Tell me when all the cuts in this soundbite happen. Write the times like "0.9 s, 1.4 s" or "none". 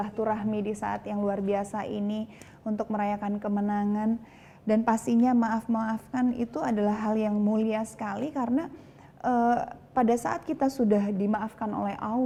none